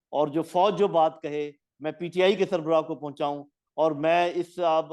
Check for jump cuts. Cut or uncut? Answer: uncut